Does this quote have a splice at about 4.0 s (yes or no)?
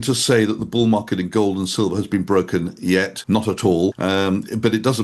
yes